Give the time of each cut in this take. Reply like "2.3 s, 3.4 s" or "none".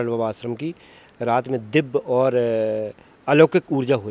none